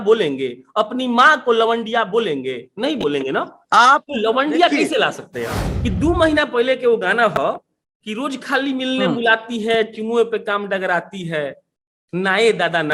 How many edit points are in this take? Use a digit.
1